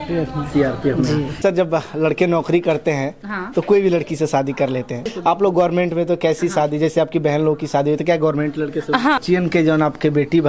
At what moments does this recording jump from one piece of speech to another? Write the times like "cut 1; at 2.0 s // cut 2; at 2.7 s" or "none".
cut 1; at 1.4 s // cut 2; at 5.1 s // cut 3; at 9.2 s